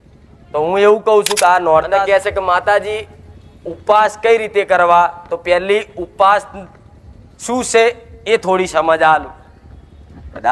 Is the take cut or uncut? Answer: cut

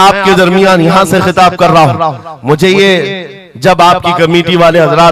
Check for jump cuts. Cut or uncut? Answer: uncut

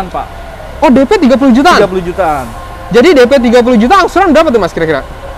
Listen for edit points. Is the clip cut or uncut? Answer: uncut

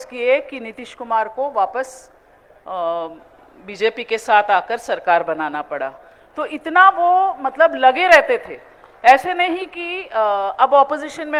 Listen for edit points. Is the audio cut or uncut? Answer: uncut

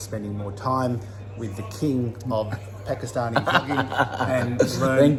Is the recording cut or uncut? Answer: uncut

